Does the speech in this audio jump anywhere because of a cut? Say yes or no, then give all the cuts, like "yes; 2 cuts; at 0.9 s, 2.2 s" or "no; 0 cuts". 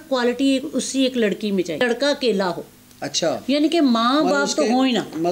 yes; 1 cut; at 1.8 s